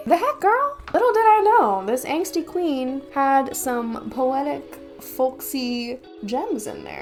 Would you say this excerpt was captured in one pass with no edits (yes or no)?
yes